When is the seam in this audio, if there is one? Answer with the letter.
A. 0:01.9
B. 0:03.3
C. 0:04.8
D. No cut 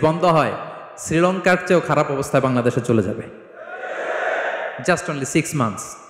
D